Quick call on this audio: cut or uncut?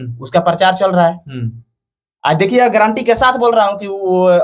uncut